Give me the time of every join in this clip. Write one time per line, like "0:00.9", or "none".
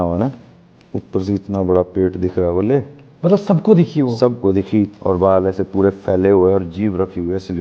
0:04.9